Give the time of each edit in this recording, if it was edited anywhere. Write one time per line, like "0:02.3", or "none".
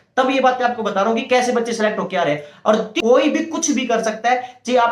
0:02.9